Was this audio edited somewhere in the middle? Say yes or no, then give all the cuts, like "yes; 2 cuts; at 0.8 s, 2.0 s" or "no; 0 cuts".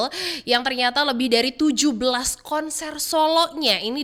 no; 0 cuts